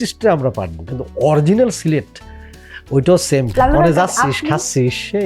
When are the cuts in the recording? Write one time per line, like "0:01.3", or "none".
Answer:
0:03.5

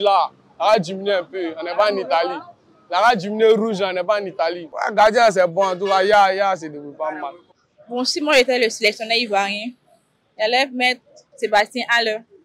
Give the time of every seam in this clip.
none

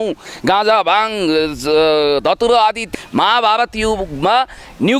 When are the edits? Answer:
0:02.9

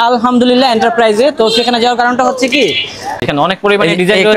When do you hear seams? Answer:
0:03.2

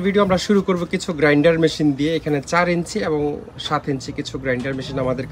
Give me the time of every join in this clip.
none

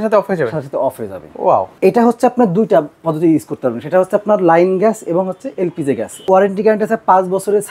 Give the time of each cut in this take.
0:01.7
0:06.3

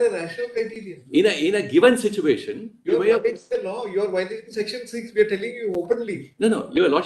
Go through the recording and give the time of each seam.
none

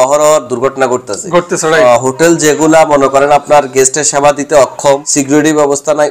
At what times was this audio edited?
0:01.8
0:05.1

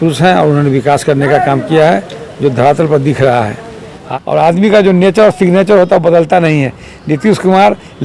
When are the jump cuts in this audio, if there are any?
0:04.0

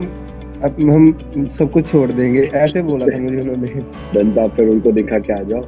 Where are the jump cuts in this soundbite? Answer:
none

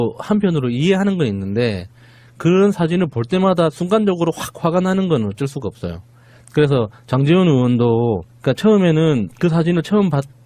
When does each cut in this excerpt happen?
0:01.3

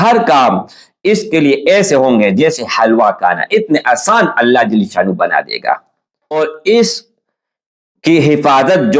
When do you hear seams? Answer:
0:06.3

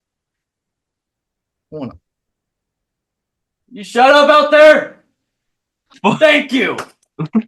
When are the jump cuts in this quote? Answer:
0:06.0

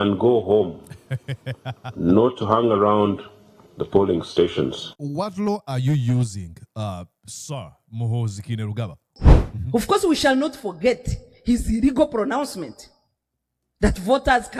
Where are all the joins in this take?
0:09.1

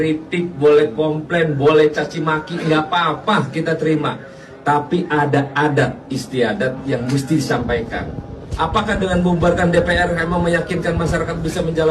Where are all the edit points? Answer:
none

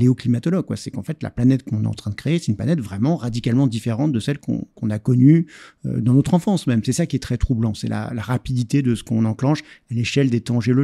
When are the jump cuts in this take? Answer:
none

